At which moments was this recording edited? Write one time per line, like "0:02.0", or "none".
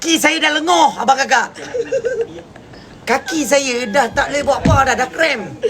none